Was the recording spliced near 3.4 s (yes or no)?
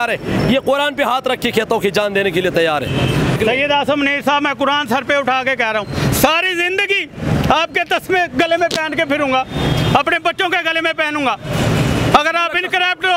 yes